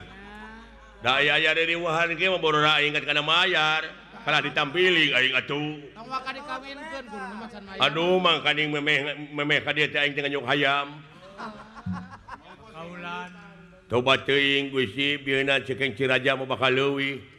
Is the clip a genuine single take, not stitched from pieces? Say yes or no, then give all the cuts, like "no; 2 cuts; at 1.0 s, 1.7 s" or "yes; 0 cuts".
yes; 0 cuts